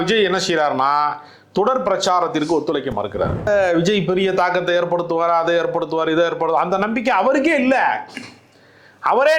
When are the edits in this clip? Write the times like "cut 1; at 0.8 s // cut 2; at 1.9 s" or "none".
cut 1; at 3.5 s

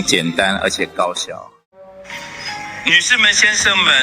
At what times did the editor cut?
cut 1; at 2.0 s

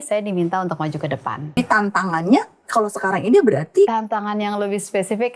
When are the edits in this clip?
cut 1; at 1.5 s // cut 2; at 3.9 s

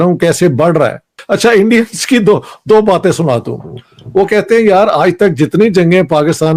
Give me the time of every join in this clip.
none

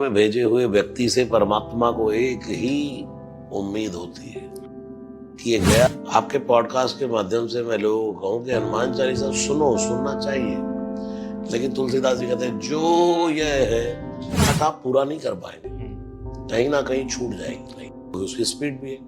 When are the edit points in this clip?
cut 1; at 5.9 s // cut 2; at 14.5 s

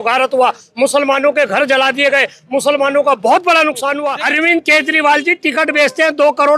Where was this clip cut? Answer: cut 1; at 4.1 s

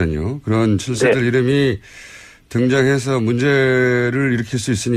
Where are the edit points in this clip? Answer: cut 1; at 3.5 s

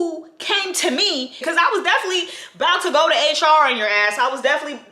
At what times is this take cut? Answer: cut 1; at 1.4 s

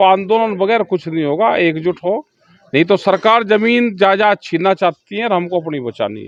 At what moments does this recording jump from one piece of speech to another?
none

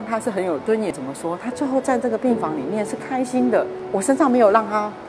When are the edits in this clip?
cut 1; at 1.0 s // cut 2; at 3.8 s

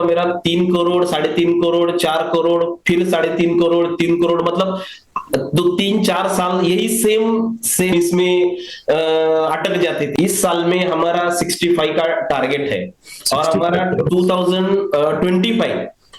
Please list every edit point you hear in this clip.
cut 1; at 7.9 s // cut 2; at 10.1 s

